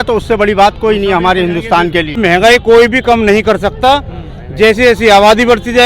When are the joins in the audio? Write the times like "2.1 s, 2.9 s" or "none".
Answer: 2.2 s